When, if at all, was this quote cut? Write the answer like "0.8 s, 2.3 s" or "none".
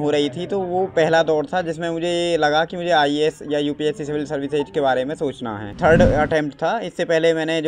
5.7 s